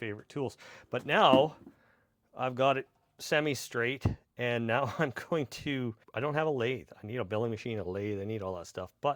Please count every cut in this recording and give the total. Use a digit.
1